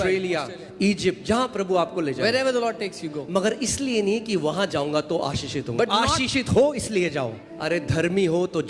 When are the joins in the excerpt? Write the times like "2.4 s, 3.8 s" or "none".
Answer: 7.4 s